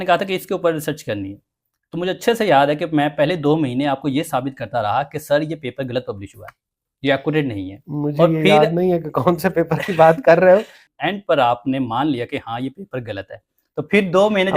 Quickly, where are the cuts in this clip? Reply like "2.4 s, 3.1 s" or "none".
10.8 s